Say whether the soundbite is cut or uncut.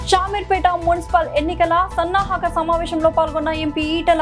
uncut